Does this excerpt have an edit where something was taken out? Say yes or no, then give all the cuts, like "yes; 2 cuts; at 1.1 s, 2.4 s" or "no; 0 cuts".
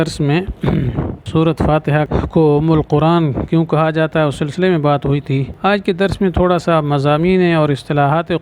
yes; 3 cuts; at 1.2 s, 2.1 s, 5.5 s